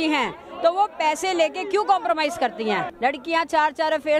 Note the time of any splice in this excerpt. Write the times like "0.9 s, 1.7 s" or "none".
2.9 s